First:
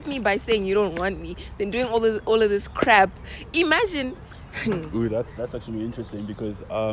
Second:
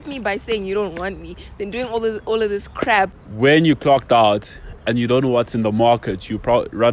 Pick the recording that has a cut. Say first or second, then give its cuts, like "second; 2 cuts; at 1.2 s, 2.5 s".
second; 1 cut; at 3.2 s